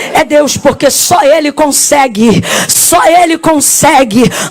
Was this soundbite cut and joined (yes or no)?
no